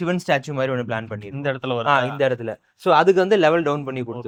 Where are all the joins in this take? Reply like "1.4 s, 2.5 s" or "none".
none